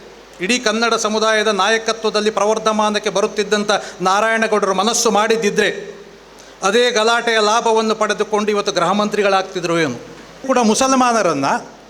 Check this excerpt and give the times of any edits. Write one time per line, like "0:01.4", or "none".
0:10.4